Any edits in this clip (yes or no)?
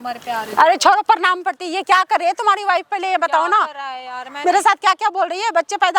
no